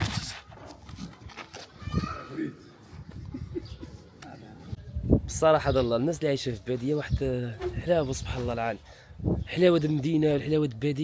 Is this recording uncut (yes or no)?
no